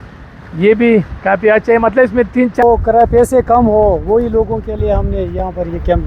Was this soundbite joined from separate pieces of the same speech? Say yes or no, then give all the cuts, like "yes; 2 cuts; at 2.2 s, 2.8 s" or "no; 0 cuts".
yes; 1 cut; at 2.6 s